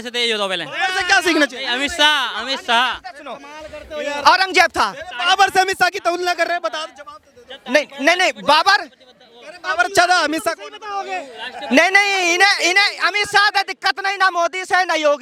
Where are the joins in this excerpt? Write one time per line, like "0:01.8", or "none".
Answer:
none